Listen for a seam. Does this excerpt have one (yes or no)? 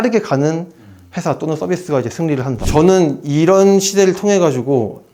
yes